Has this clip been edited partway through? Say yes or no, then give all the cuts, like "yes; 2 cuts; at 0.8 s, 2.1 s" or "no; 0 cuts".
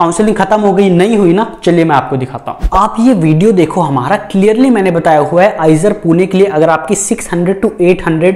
no; 0 cuts